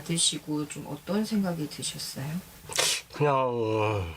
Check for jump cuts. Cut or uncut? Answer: cut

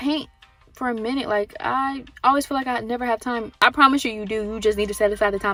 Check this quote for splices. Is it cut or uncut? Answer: uncut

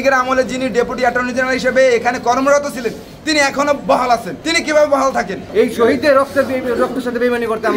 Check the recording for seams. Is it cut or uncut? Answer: cut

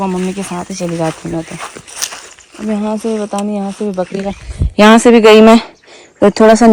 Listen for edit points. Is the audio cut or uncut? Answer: uncut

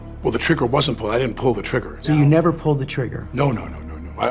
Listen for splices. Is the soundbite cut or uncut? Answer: cut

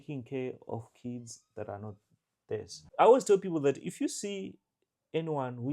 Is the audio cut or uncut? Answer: cut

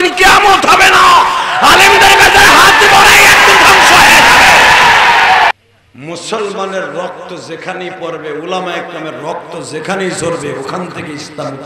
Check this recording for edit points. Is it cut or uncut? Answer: cut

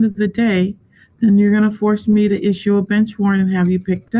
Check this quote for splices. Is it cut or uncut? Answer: uncut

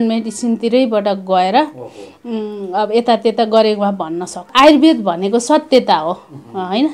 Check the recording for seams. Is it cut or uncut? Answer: cut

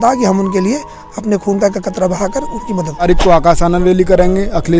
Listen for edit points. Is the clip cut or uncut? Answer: cut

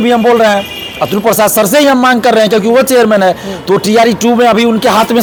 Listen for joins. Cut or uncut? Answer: uncut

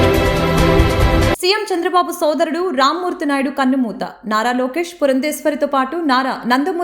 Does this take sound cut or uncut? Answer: uncut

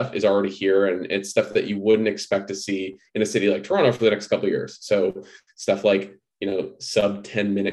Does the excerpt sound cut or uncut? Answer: uncut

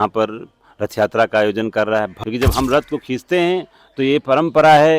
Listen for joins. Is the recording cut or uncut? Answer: cut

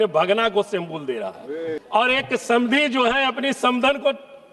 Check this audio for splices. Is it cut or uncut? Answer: cut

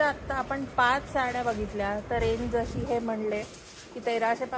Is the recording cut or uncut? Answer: uncut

